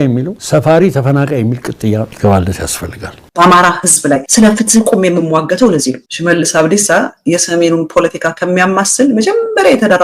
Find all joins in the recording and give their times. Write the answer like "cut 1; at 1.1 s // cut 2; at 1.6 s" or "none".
cut 1; at 3.1 s // cut 2; at 6.0 s

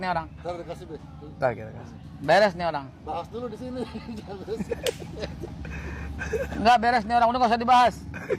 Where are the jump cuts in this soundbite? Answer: none

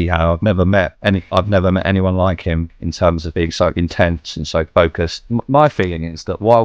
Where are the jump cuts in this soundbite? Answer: cut 1; at 0.9 s // cut 2; at 3.2 s // cut 3; at 5.2 s

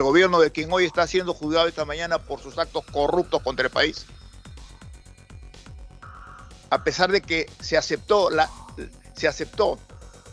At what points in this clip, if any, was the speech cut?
none

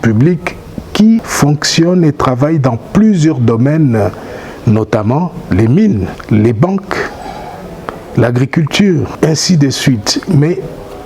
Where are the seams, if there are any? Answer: cut 1; at 1.3 s // cut 2; at 6.1 s // cut 3; at 9.1 s

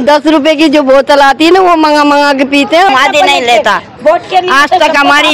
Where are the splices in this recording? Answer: cut 1; at 2.9 s

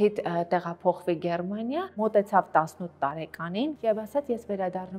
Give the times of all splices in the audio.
cut 1; at 1.9 s // cut 2; at 3.8 s

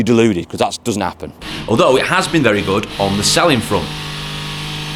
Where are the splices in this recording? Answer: cut 1; at 1.4 s

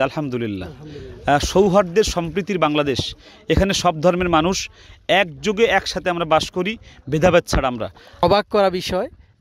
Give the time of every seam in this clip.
cut 1; at 8.2 s

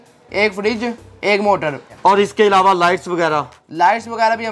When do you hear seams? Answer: cut 1; at 1.9 s

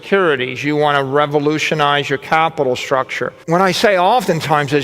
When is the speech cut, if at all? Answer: cut 1; at 3.4 s

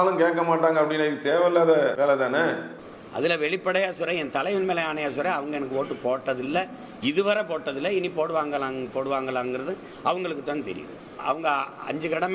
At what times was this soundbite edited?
none

